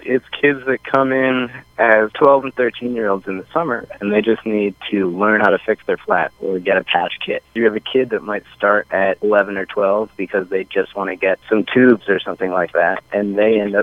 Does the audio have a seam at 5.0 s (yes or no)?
no